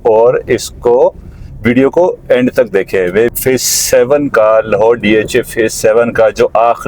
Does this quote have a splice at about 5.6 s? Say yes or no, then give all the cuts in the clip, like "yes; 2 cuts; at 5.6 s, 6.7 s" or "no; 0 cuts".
no; 1 cut; at 3.3 s